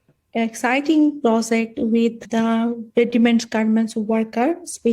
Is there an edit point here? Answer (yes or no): yes